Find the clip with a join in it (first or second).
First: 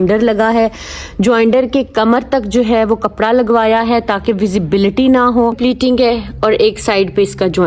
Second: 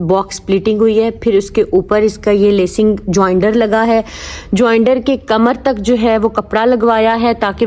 first